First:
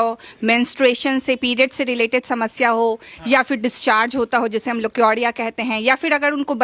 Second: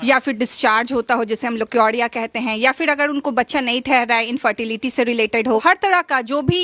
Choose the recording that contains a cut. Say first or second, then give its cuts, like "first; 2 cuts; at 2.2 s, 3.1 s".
second; 1 cut; at 5.6 s